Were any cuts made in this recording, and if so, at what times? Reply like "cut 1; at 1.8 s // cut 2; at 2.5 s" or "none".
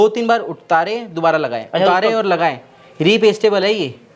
none